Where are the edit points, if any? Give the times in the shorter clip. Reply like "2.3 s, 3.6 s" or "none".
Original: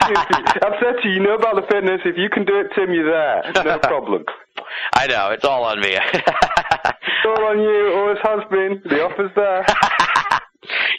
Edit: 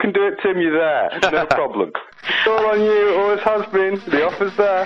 2.3 s